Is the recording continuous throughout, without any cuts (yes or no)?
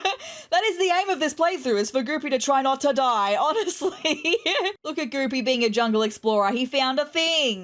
no